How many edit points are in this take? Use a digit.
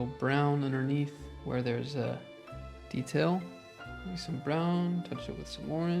0